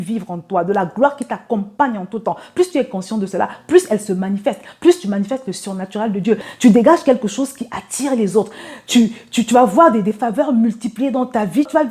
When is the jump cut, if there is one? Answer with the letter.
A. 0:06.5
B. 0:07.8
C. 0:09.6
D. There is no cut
A